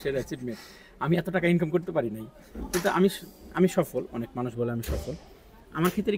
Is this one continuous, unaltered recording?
yes; 0 cuts

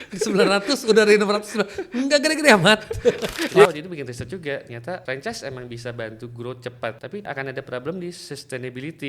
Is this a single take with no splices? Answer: no; 3 cuts; at 3.7 s, 5.0 s, 7.2 s

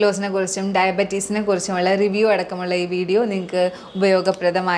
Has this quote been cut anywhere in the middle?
no; 0 cuts

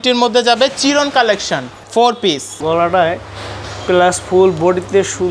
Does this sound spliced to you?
no; 0 cuts

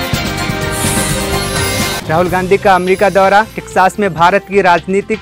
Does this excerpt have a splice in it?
yes; 1 cut; at 2.0 s

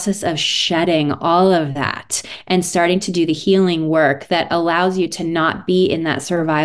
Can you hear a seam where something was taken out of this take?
no; 0 cuts

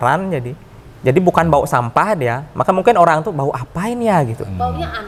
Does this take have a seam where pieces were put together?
no; 0 cuts

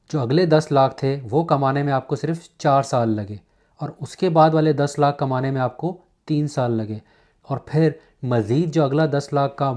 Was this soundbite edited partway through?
no; 0 cuts

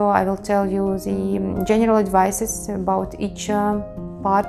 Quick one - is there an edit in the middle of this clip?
no; 0 cuts

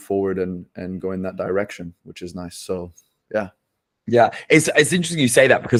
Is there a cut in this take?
no; 0 cuts

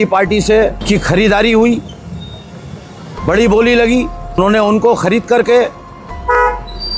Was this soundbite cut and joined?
yes; 2 cuts; at 0.8 s, 4.4 s

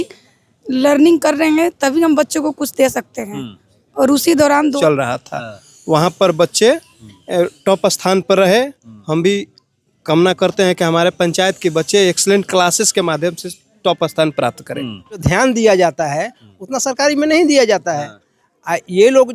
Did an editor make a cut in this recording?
yes; 2 cuts; at 4.8 s, 15.2 s

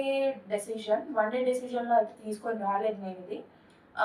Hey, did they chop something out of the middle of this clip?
no; 0 cuts

